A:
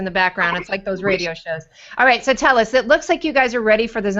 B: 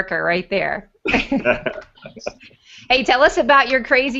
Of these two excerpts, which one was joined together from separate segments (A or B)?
B